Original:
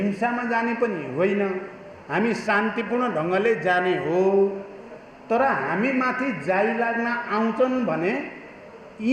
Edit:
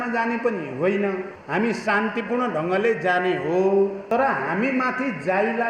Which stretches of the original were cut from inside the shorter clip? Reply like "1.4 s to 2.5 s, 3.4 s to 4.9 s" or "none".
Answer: 1.7 s to 1.9 s, 4.6 s to 5.2 s